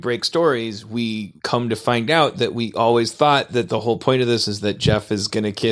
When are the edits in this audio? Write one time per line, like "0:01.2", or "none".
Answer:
0:01.4